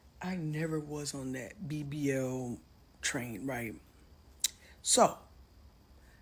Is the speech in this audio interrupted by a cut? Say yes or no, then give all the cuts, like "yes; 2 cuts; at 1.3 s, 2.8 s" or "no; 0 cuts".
no; 0 cuts